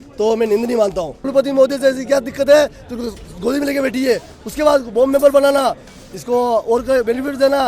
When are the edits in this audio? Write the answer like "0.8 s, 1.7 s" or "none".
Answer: 1.2 s